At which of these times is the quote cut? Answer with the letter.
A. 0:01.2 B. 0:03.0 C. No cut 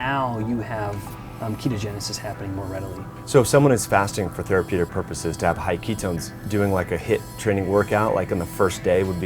B